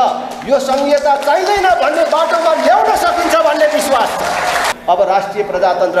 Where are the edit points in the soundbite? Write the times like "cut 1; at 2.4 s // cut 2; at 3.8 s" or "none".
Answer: cut 1; at 4.7 s

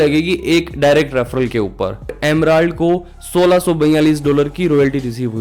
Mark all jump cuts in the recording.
cut 1; at 2.1 s

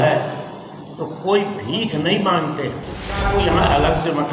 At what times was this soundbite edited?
cut 1; at 3.2 s

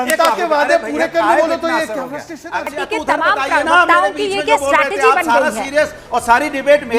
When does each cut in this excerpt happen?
cut 1; at 2.7 s

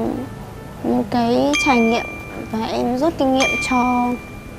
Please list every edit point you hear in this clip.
none

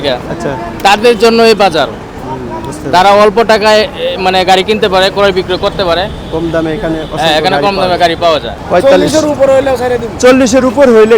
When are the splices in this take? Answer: cut 1; at 8.5 s

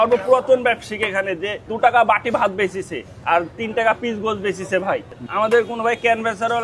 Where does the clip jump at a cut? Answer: none

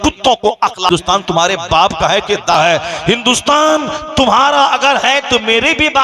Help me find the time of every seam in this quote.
cut 1; at 0.9 s // cut 2; at 2.5 s

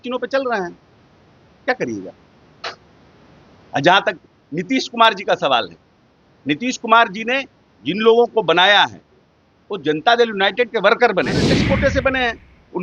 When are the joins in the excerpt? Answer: cut 1; at 11.4 s

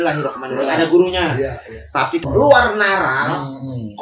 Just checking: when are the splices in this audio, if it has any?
cut 1; at 2.2 s

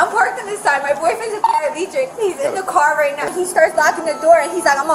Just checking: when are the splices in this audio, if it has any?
cut 1; at 3.3 s

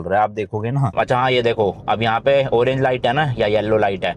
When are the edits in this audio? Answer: cut 1; at 0.9 s

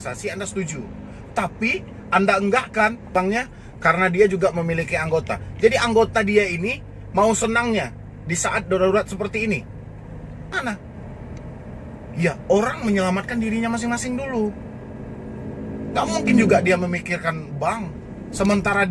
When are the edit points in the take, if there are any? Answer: cut 1; at 3.1 s // cut 2; at 10.5 s

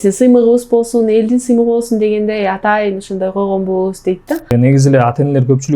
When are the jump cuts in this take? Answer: cut 1; at 4.5 s

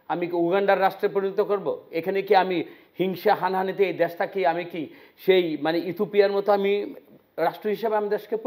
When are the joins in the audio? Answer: none

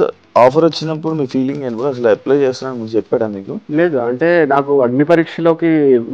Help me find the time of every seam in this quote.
cut 1; at 3.6 s

